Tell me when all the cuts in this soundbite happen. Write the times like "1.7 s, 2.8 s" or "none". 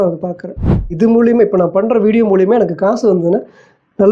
0.9 s